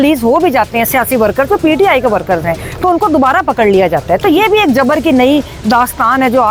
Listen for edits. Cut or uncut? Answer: uncut